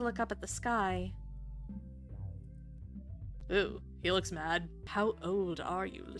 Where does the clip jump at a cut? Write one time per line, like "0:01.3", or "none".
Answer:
0:04.8